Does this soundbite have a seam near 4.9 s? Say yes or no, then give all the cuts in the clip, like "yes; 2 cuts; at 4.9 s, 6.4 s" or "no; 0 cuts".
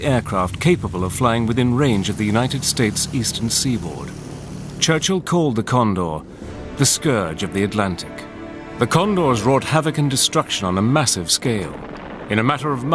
yes; 1 cut; at 4.9 s